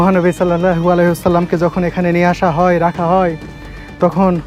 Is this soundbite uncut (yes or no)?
yes